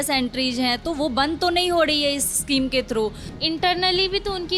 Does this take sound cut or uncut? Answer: cut